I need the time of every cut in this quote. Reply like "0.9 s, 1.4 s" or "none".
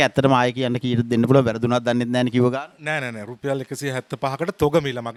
none